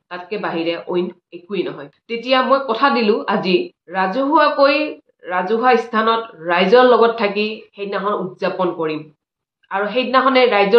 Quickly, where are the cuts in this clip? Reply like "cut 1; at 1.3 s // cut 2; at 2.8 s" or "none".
cut 1; at 1.9 s // cut 2; at 3.8 s